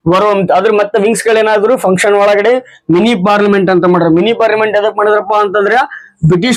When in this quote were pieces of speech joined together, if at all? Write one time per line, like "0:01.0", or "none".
none